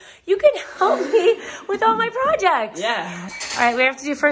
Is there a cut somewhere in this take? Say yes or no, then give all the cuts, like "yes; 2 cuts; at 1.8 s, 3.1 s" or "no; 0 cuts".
yes; 1 cut; at 3.3 s